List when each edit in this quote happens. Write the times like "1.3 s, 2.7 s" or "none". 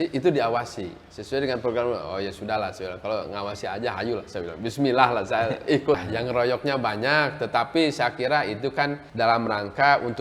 6.0 s

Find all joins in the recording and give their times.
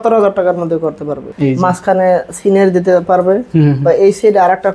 1.3 s

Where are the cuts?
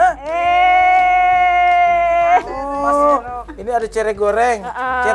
2.6 s

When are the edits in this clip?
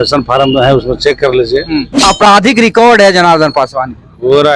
1.9 s

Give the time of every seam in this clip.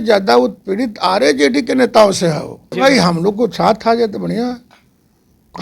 2.7 s

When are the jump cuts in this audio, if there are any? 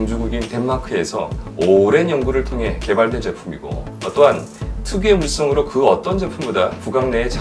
1.4 s

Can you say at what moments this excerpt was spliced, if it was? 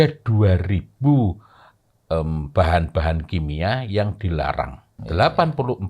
4.9 s

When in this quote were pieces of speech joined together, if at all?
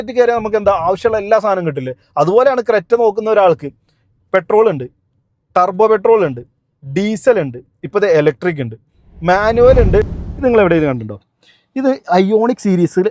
10.2 s

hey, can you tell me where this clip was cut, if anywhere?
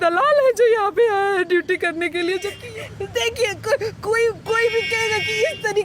2.6 s

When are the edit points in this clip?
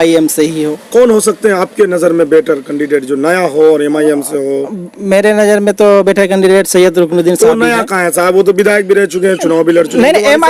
none

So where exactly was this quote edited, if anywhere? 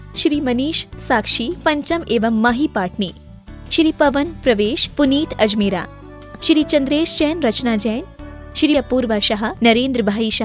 8.8 s

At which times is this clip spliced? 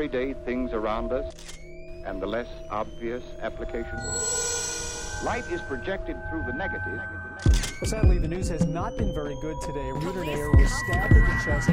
none

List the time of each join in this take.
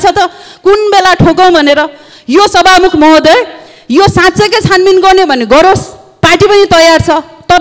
none

